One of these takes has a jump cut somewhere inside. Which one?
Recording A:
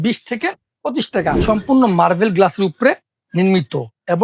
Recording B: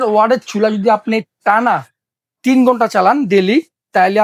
A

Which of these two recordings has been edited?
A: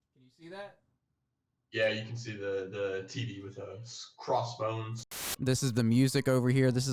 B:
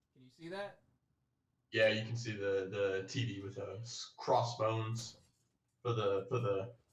A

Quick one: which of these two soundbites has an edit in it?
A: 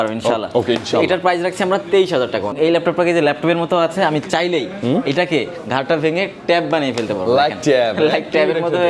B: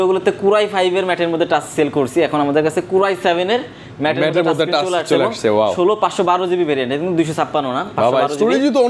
A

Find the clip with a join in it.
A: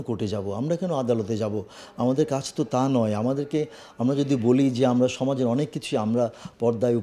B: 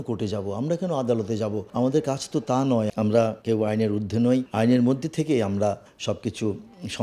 B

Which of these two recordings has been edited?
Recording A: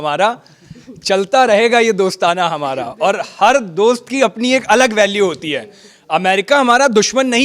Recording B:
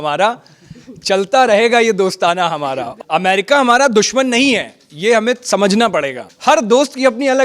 B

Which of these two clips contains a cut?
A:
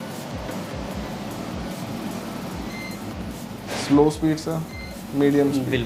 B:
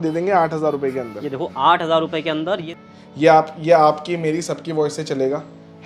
B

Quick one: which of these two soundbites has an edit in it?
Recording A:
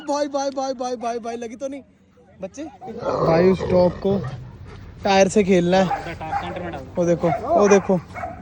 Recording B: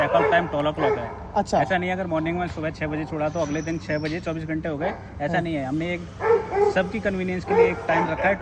A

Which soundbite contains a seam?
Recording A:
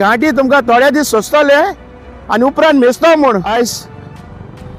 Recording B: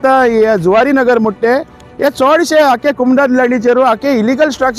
A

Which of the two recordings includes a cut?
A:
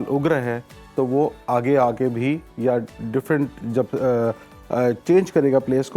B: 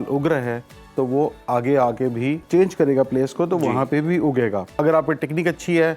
B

